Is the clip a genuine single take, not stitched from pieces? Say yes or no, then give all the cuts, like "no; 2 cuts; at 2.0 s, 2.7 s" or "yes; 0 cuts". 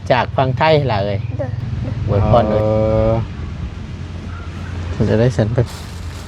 no; 1 cut; at 2.5 s